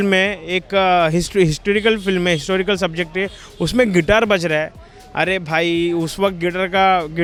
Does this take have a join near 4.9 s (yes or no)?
no